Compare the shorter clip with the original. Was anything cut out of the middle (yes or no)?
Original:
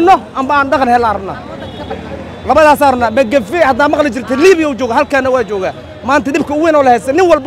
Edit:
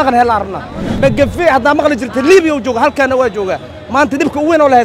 yes